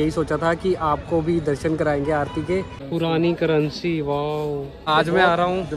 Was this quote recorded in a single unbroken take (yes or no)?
no